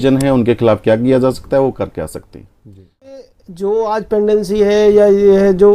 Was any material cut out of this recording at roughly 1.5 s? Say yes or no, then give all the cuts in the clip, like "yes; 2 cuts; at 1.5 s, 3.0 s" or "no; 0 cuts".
no; 1 cut; at 3.1 s